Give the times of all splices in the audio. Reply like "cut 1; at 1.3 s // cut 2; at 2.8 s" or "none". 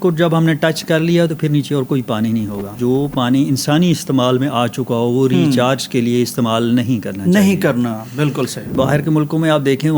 cut 1; at 2.8 s // cut 2; at 8.7 s